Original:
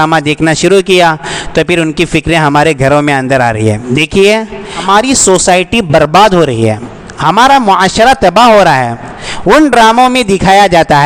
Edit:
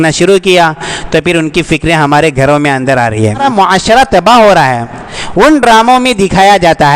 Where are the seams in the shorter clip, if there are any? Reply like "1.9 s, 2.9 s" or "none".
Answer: 3.4 s